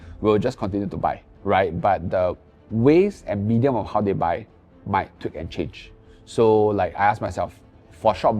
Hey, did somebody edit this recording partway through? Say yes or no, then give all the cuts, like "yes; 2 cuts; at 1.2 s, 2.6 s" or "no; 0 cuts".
no; 0 cuts